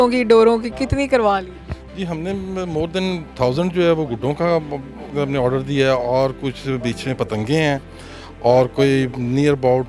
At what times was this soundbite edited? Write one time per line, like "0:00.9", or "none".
none